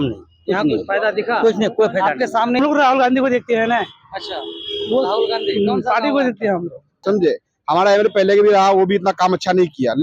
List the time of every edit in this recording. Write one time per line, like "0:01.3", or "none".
0:02.6
0:06.9